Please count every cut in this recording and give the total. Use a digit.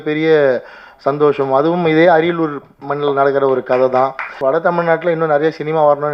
1